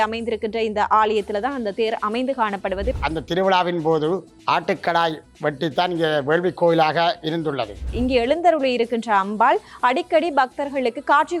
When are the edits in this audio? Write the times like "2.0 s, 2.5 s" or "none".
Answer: 2.9 s, 4.3 s, 7.9 s